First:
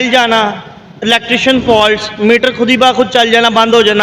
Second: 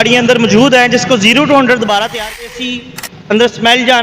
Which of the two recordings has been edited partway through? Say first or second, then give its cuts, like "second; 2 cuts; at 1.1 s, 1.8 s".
second; 1 cut; at 2.5 s